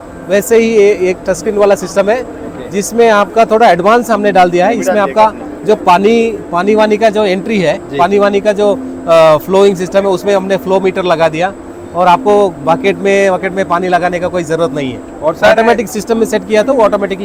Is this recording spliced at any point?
no; 0 cuts

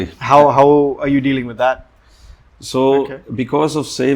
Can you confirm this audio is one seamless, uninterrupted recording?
no; 1 cut; at 2.4 s

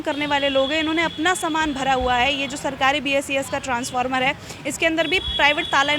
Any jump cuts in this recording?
no; 0 cuts

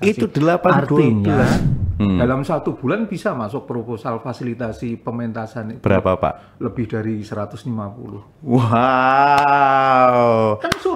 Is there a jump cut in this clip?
yes; 1 cut; at 1.7 s

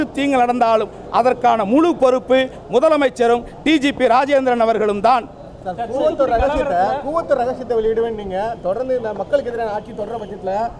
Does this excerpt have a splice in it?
no; 0 cuts

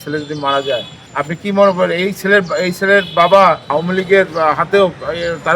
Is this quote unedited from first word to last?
no; 2 cuts; at 1.0 s, 3.7 s

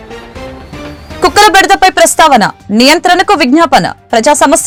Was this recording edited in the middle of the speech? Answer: no; 0 cuts

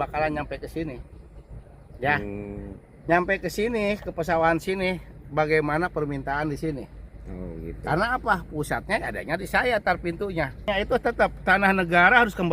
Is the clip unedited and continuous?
no; 1 cut; at 10.7 s

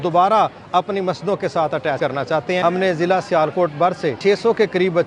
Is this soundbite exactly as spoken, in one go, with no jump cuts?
no; 2 cuts; at 2.1 s, 4.2 s

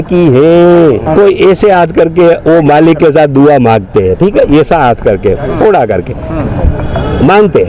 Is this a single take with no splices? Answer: no; 1 cut; at 1.0 s

